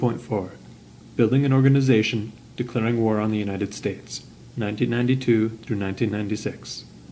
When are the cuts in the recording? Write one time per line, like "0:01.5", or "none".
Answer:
none